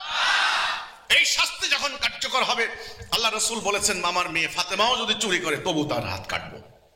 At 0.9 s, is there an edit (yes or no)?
no